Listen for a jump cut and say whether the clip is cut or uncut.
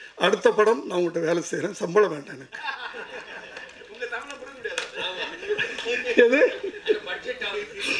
uncut